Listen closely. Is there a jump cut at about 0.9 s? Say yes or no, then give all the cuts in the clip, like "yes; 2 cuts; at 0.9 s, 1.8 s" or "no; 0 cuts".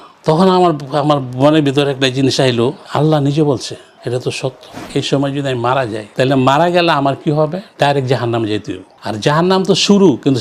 no; 1 cut; at 4.9 s